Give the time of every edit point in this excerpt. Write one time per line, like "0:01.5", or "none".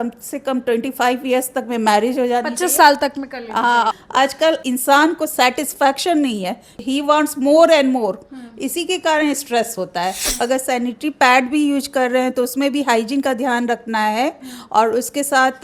0:03.9
0:06.8
0:10.2